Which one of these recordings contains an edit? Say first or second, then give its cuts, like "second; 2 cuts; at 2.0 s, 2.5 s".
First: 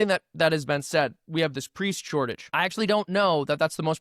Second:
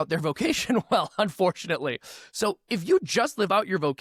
first; 1 cut; at 2.4 s